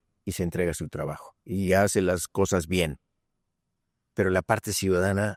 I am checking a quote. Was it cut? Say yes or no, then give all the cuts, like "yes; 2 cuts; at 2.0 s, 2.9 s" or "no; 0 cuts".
no; 0 cuts